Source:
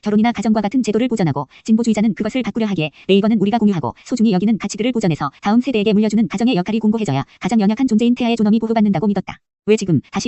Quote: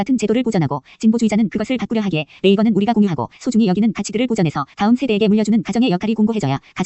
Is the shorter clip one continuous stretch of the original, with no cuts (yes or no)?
yes